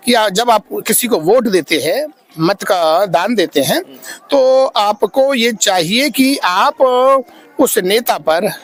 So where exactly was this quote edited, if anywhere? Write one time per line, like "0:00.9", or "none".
none